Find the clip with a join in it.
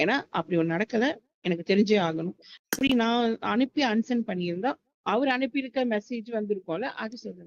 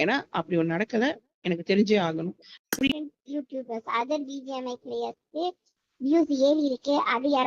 second; 1 cut; at 2.9 s

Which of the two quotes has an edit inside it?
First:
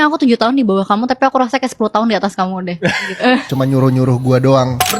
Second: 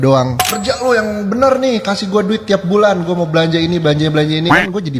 first; 1 cut; at 3.5 s

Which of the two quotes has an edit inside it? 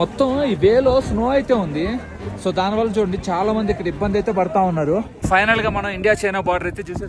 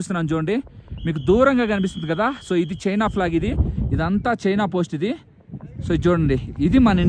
first; 1 cut; at 5.1 s

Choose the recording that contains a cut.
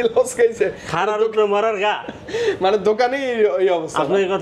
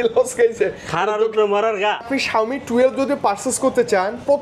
second; 1 cut; at 2.1 s

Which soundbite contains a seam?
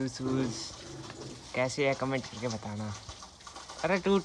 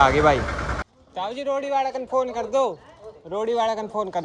second; 1 cut; at 1.0 s

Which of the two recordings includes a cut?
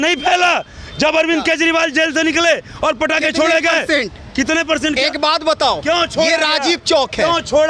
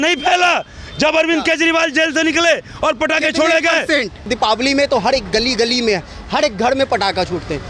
second; 1 cut; at 4.3 s

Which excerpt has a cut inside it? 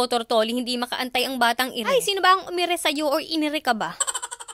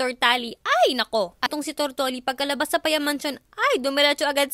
second; 1 cut; at 1.5 s

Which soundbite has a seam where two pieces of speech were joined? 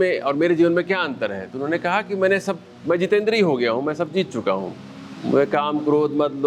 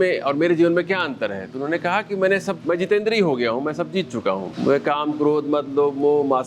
second; 2 cuts; at 2.6 s, 4.5 s

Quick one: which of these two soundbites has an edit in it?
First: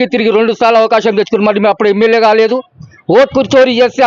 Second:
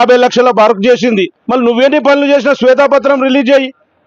second; 1 cut; at 1.4 s

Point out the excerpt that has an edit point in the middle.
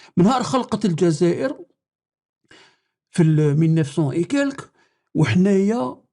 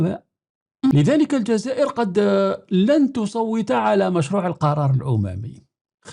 second; 1 cut; at 0.9 s

